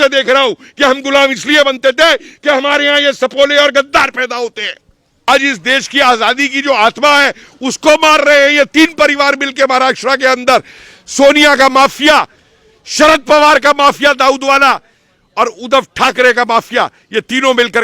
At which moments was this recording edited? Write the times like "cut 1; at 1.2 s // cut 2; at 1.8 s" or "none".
cut 1; at 5.3 s